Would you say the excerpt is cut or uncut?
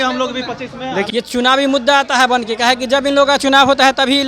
cut